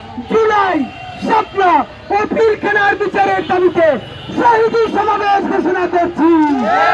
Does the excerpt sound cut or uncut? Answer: uncut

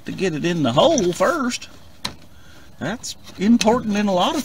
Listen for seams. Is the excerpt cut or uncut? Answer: uncut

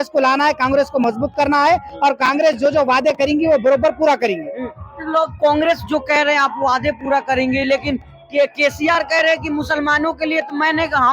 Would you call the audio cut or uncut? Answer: uncut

